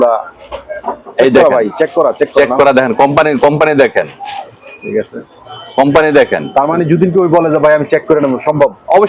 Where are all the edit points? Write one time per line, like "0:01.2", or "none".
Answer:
none